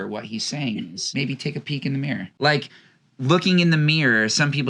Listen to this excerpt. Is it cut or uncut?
cut